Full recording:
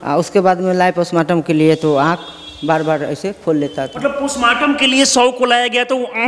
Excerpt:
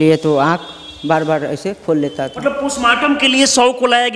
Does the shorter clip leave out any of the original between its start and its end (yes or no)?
no